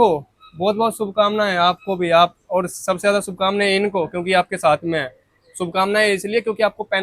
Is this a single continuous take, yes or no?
yes